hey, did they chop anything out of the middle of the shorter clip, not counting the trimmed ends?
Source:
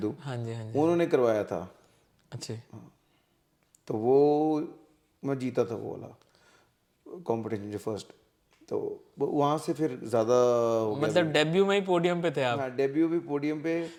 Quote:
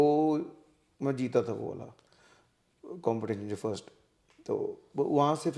no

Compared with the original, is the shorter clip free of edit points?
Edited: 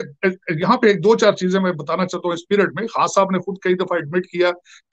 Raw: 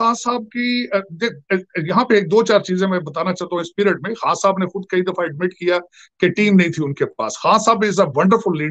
yes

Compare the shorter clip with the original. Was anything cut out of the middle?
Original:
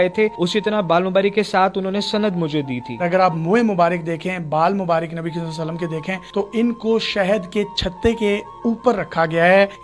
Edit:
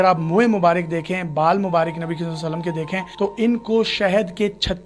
no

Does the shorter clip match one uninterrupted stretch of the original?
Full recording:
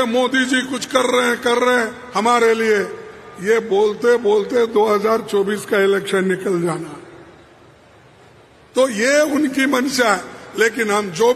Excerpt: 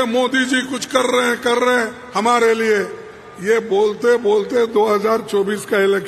yes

